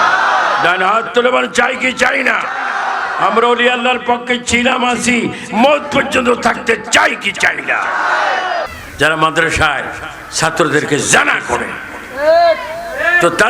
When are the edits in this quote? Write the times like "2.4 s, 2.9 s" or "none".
8.8 s

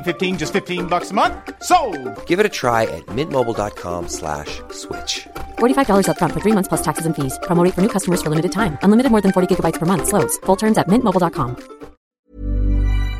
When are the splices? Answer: 12.0 s

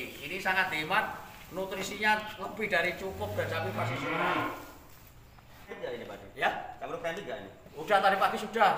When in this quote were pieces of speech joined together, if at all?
5.7 s

